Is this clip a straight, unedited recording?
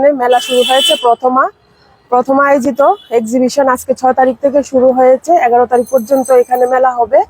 yes; 0 cuts

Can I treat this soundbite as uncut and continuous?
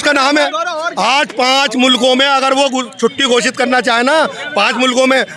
yes; 0 cuts

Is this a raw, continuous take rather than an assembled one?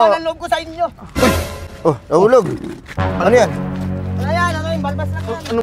yes; 0 cuts

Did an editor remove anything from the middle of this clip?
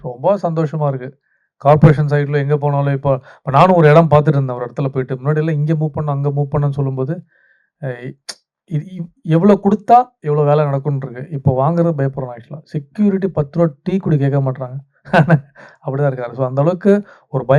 no; 0 cuts

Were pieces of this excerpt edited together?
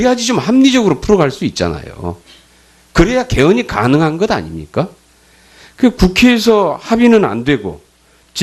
no; 0 cuts

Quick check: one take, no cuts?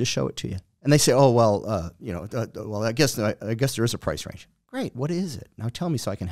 yes; 0 cuts

